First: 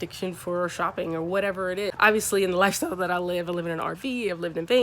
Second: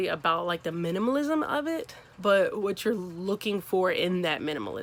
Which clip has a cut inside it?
first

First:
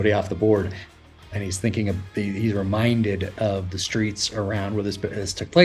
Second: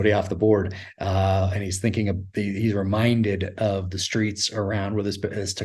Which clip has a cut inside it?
first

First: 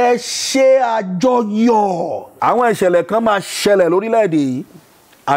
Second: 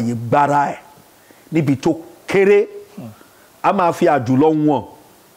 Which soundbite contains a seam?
first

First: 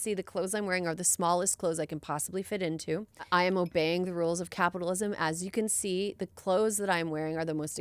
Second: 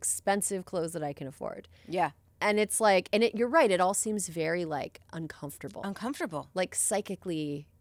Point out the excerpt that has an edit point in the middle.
first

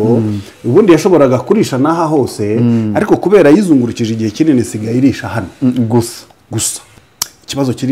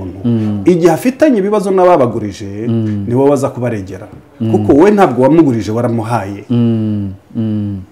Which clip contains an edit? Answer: first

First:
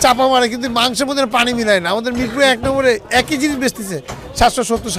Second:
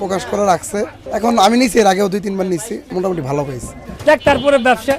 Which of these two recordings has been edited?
second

